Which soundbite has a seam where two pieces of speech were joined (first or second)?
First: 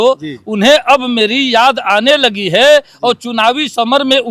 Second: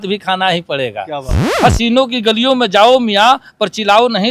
second